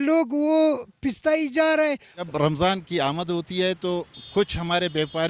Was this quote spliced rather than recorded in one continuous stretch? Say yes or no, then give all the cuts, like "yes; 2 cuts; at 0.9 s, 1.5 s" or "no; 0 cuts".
yes; 1 cut; at 2.3 s